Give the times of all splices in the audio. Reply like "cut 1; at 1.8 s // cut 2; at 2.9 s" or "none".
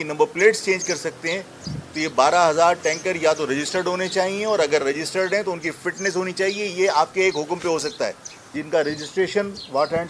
cut 1; at 8.5 s